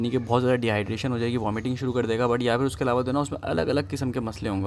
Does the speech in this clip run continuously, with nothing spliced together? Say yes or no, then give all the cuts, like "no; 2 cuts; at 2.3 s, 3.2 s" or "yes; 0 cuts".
yes; 0 cuts